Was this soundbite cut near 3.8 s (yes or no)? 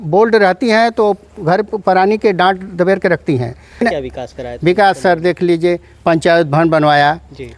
yes